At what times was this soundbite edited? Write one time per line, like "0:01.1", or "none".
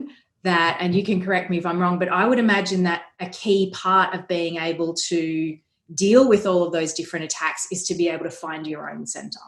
0:03.1